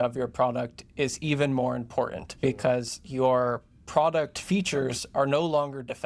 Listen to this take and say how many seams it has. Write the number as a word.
zero